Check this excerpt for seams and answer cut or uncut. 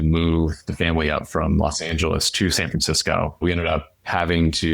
cut